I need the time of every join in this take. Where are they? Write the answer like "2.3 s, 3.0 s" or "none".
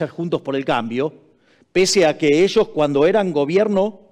none